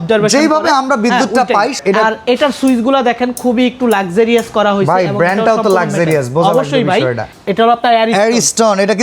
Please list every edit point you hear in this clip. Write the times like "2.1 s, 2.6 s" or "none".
1.8 s, 7.3 s